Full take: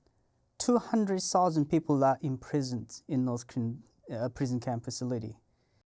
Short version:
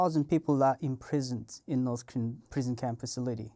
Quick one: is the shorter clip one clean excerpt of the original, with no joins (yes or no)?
no